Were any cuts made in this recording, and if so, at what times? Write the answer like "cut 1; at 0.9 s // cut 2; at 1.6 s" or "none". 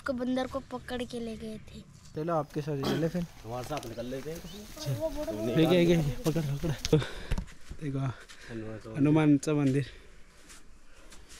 cut 1; at 2.1 s // cut 2; at 6.9 s